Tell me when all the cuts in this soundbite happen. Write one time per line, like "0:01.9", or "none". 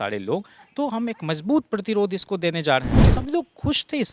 0:03.1